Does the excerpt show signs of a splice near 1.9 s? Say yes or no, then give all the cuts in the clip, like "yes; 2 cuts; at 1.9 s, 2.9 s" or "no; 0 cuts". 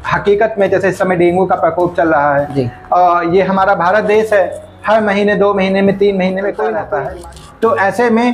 no; 1 cut; at 6.8 s